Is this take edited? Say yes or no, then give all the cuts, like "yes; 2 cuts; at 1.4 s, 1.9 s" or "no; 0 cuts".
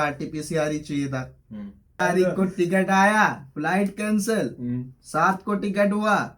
yes; 1 cut; at 2.0 s